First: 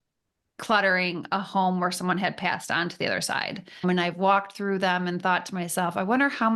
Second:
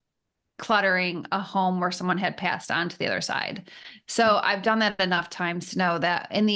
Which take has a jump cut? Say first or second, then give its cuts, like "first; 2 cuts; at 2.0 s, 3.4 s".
first; 1 cut; at 3.8 s